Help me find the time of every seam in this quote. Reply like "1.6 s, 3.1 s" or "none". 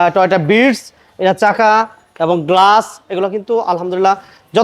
none